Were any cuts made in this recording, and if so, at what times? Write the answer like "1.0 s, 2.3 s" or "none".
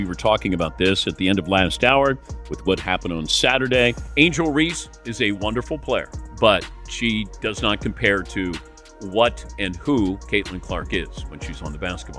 4.0 s, 6.2 s